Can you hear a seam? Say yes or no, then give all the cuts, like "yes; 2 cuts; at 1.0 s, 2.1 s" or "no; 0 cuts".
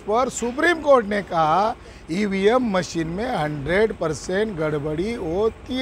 no; 0 cuts